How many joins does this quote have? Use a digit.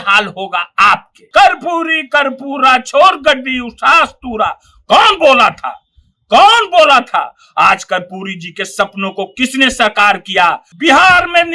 2